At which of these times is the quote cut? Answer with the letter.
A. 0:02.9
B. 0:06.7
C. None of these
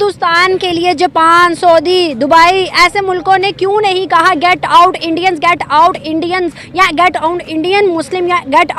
C